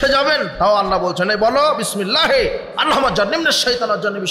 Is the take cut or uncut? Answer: uncut